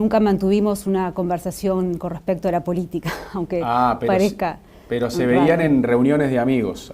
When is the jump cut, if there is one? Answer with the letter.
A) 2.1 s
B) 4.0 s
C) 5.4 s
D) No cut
A